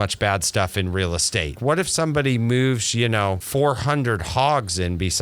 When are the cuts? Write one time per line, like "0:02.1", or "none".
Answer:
0:01.6
0:03.4